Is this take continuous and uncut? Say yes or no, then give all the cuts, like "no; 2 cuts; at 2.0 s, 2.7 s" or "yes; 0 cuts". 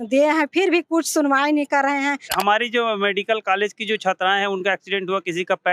no; 1 cut; at 2.3 s